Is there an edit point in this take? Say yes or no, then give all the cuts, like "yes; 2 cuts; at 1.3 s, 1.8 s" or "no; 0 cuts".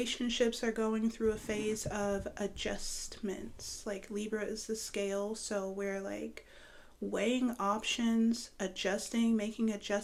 no; 0 cuts